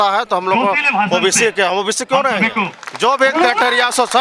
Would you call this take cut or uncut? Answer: cut